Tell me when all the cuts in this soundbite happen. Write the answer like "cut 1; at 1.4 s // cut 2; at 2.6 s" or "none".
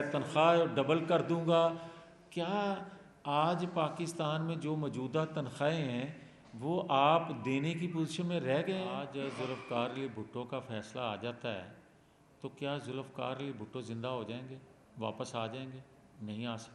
cut 1; at 9.0 s